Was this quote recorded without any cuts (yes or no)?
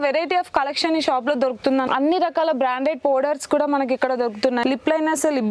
no